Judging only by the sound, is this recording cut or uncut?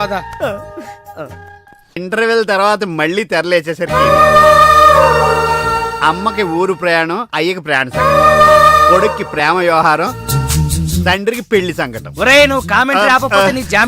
cut